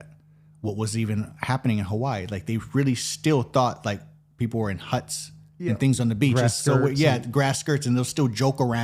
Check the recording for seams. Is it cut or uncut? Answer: uncut